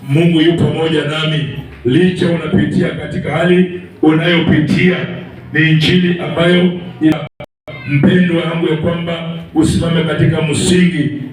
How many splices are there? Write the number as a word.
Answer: one